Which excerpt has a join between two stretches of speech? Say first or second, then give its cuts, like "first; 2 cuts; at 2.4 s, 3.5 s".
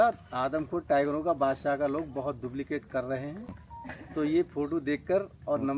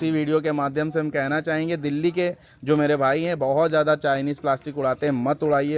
first; 1 cut; at 3.5 s